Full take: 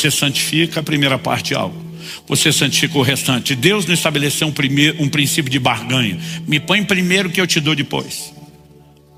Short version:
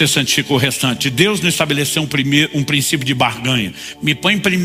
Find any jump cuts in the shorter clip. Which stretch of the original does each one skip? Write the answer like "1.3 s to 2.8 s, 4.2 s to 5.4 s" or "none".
none